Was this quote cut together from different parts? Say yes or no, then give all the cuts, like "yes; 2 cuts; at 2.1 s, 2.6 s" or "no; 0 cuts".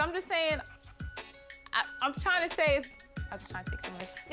no; 0 cuts